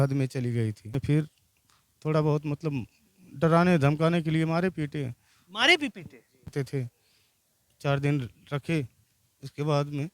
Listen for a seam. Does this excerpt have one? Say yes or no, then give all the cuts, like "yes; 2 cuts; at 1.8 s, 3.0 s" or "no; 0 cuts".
yes; 2 cuts; at 0.9 s, 6.5 s